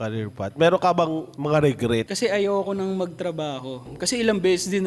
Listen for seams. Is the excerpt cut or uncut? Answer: cut